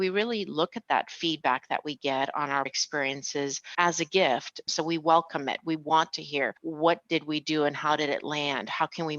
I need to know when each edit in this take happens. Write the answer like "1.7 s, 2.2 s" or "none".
2.7 s, 4.6 s, 6.6 s